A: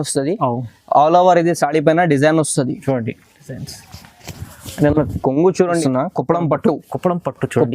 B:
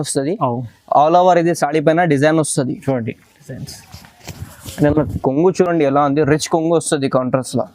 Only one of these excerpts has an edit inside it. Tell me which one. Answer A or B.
A